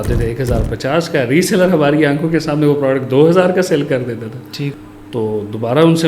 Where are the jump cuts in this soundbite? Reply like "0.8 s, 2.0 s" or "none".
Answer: 4.8 s